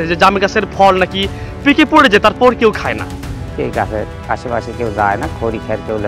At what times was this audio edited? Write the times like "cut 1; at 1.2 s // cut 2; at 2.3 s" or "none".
cut 1; at 3.5 s